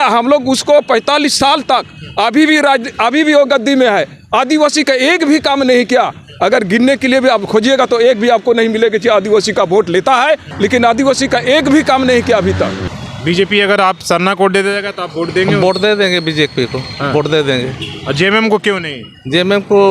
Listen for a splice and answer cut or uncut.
cut